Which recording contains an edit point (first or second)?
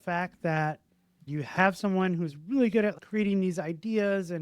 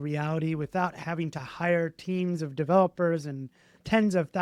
first